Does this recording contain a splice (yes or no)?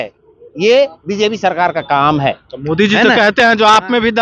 no